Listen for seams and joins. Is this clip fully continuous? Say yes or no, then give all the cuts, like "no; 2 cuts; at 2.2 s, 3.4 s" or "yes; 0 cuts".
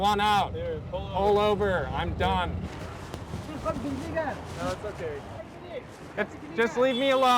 no; 2 cuts; at 2.7 s, 5.5 s